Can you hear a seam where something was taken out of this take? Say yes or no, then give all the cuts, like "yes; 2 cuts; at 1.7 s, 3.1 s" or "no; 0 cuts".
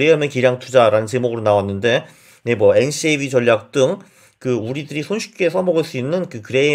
no; 0 cuts